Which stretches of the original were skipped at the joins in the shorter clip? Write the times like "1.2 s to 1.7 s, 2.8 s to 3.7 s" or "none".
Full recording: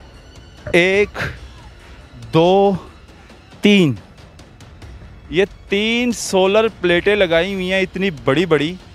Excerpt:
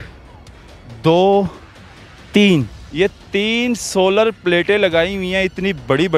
4.1 s to 5.2 s